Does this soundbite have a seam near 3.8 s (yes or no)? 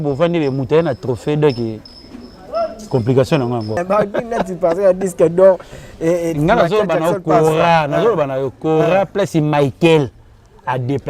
yes